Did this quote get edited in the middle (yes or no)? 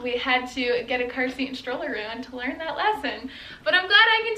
no